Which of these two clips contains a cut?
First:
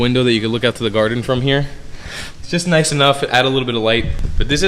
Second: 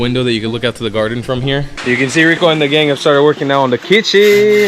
second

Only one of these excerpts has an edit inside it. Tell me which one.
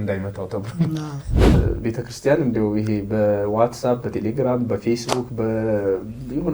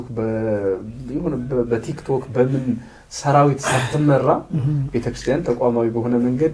first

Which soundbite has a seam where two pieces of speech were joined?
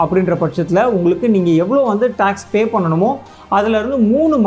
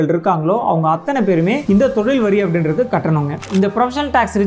second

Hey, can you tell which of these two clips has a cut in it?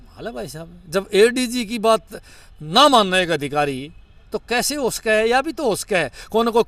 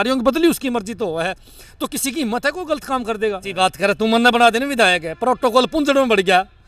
second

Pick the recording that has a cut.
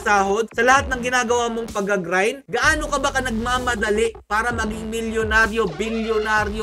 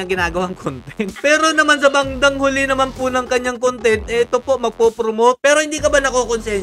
second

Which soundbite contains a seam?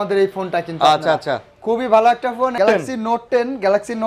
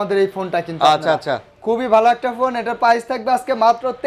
first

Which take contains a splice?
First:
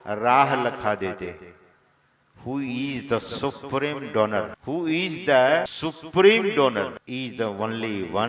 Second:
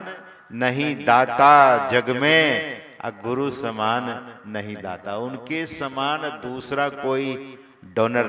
first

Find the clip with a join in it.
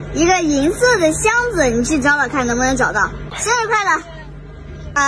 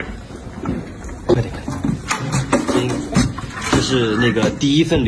first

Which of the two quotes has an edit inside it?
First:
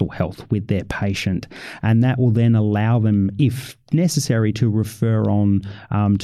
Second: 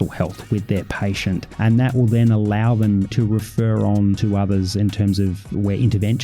second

